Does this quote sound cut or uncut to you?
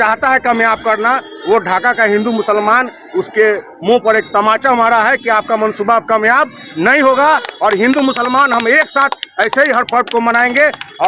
uncut